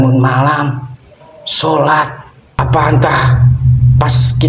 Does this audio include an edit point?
yes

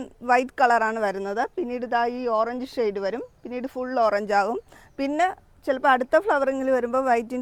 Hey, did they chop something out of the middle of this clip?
no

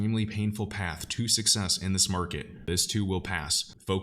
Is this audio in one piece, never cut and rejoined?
no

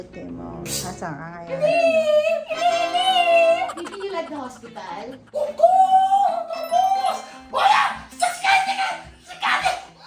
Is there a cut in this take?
no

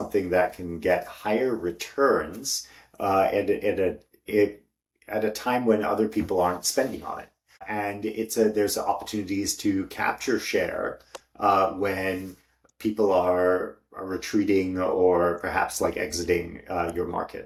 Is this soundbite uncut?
yes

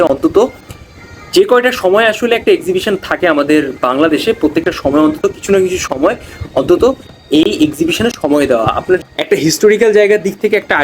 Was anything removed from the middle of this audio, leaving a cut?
yes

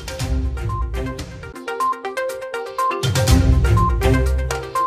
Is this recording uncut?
yes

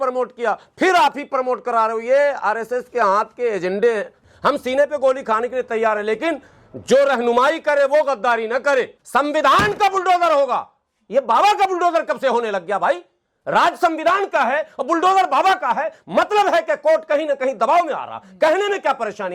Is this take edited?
yes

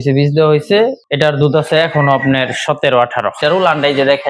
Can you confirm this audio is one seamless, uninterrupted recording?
no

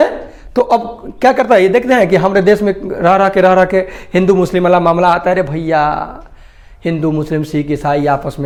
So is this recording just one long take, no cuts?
yes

